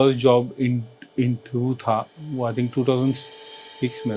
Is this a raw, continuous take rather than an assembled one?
yes; 0 cuts

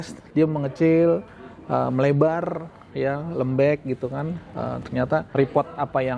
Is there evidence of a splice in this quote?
yes; 1 cut; at 5.3 s

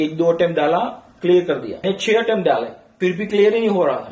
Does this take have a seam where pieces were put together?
yes; 2 cuts; at 1.8 s, 2.8 s

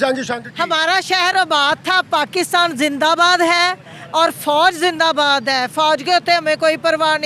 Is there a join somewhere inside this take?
no; 0 cuts

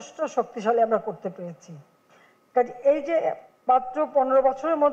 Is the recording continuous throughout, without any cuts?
yes; 0 cuts

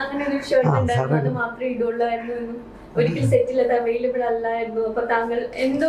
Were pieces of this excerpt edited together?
no; 0 cuts

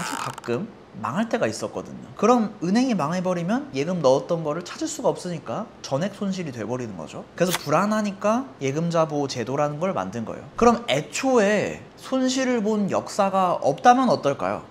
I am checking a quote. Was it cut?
yes; 1 cut; at 10.4 s

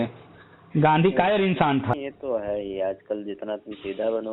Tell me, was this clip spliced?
yes; 1 cut; at 1.9 s

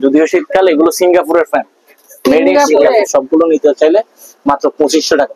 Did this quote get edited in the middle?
yes; 1 cut; at 3.1 s

